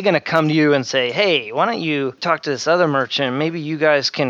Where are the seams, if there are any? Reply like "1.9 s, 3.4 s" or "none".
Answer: 2.2 s